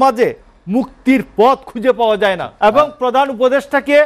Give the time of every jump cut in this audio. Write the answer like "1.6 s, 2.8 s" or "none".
2.5 s